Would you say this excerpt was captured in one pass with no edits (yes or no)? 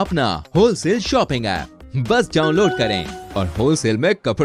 yes